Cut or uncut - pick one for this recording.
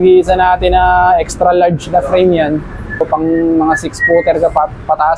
cut